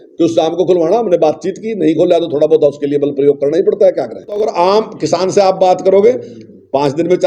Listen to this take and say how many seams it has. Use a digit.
1